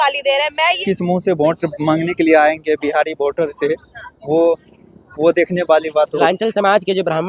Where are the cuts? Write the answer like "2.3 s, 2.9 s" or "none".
0.8 s, 6.2 s